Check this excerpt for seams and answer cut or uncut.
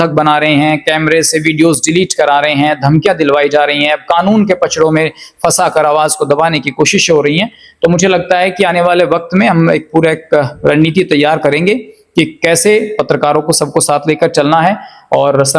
uncut